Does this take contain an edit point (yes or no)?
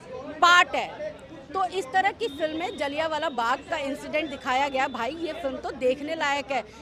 no